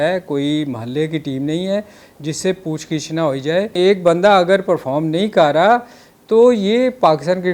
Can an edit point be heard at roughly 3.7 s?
yes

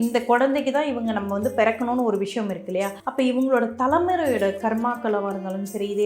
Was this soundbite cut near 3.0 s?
yes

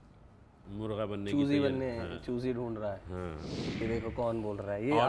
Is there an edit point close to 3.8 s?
yes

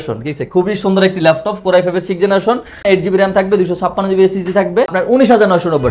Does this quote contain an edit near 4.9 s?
yes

